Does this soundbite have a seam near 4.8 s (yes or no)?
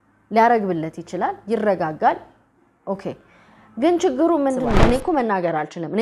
yes